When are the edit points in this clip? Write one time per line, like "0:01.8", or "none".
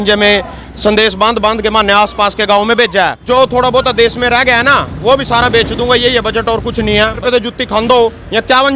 0:03.2
0:07.2

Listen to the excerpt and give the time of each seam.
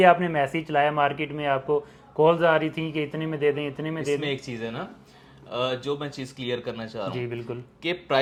none

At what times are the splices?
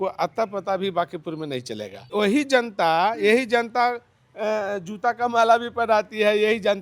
0:02.0

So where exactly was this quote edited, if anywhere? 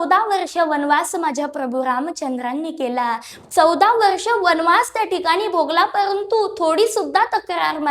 0:03.4

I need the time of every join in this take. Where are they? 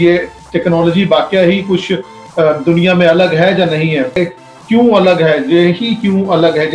0:04.2

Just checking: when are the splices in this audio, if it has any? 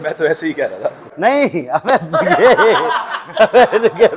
0:01.1

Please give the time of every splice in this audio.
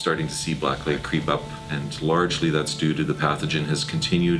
0:01.0

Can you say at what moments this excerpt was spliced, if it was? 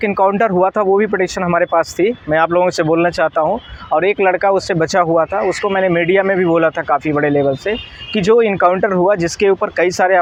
none

